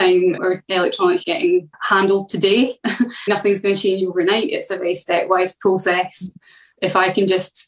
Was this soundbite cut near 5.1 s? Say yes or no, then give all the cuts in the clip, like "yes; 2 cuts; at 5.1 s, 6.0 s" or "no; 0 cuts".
no; 3 cuts; at 1.4 s, 3.3 s, 6.7 s